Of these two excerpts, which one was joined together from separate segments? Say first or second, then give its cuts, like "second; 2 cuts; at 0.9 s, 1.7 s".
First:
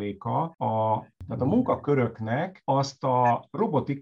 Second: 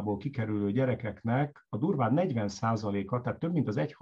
first; 1 cut; at 1.1 s